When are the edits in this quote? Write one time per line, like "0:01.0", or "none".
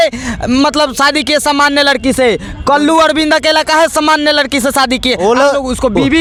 none